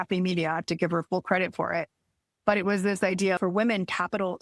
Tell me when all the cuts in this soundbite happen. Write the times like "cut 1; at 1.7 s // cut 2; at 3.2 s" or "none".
cut 1; at 3.4 s